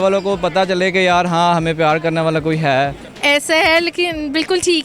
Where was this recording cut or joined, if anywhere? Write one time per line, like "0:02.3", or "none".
0:03.1